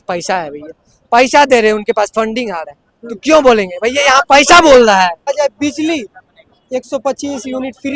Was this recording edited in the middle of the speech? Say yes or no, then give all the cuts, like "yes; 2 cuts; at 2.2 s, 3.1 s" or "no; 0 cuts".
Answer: no; 0 cuts